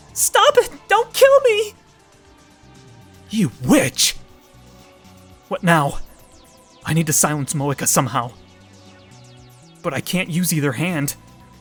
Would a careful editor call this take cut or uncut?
uncut